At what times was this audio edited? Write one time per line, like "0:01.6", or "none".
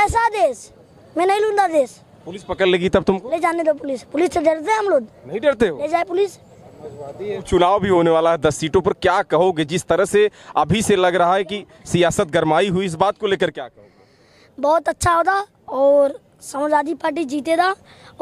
0:07.4